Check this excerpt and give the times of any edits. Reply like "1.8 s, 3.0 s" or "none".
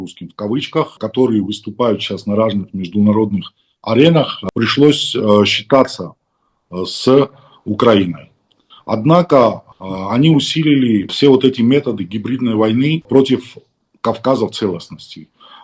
1.0 s, 11.1 s, 13.1 s

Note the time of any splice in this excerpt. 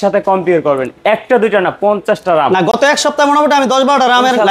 none

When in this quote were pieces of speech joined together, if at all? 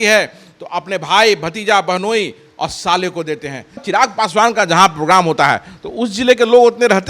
3.8 s

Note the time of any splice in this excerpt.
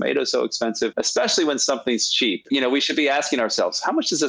0.9 s, 2.4 s

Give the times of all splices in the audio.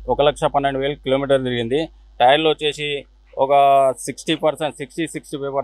none

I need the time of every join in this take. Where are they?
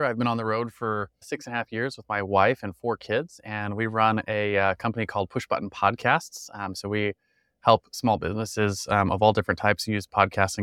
1.2 s

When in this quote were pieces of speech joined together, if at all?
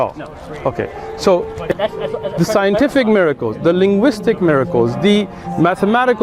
1.8 s

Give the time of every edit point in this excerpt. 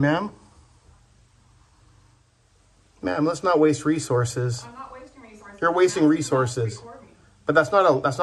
2.3 s

